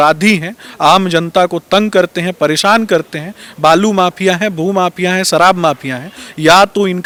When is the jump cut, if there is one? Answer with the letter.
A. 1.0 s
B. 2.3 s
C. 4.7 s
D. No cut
D